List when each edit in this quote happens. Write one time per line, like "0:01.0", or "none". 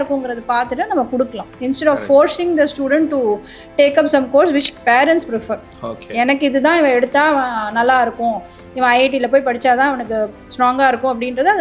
none